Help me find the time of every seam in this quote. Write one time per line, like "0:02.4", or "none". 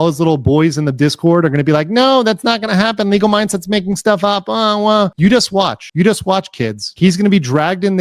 none